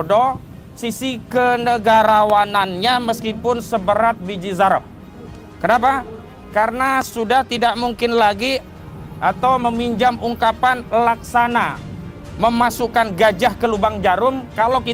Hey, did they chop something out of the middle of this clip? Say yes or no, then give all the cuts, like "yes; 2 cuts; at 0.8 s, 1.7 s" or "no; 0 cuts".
no; 0 cuts